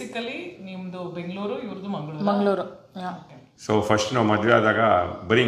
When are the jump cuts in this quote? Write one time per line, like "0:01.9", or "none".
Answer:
none